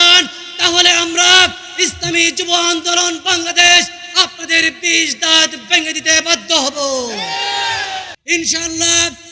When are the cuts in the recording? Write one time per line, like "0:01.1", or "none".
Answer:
0:08.1